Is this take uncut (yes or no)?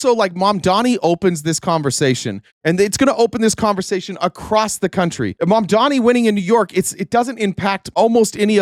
yes